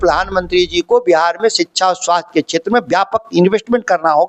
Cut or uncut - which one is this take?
uncut